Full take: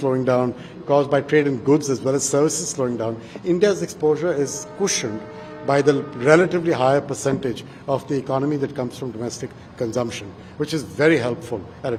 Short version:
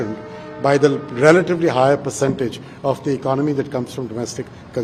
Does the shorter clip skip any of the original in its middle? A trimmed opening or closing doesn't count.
no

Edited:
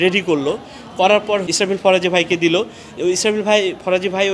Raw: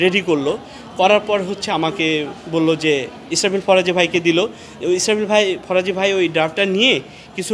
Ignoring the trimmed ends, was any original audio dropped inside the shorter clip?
yes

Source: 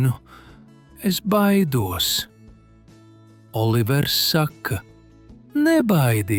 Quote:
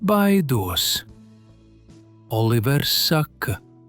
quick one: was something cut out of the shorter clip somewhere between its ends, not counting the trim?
no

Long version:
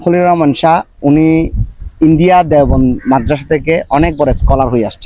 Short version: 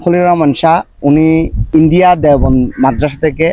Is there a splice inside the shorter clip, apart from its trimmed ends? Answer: yes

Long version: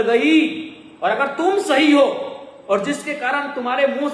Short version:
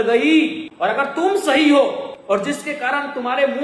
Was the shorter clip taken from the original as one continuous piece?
no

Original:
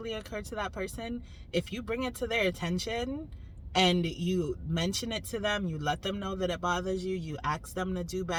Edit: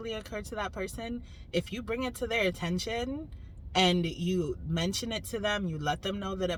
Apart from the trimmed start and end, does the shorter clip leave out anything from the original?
no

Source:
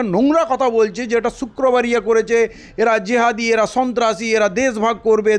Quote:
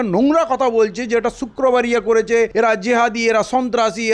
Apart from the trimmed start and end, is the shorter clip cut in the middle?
yes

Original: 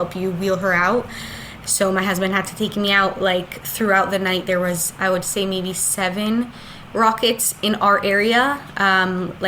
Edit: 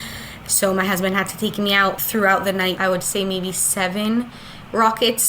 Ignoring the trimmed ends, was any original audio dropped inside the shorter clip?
yes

